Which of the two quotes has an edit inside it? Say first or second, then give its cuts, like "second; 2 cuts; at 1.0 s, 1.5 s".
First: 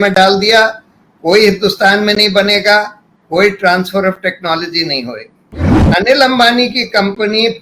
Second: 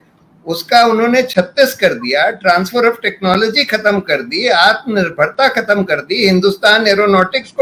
first; 1 cut; at 5.8 s